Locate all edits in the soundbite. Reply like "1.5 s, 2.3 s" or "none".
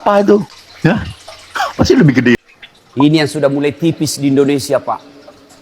2.4 s